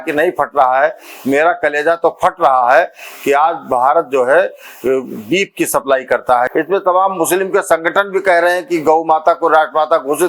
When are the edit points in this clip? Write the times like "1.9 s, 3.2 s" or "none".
6.5 s